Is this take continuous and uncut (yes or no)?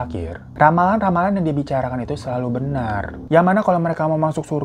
no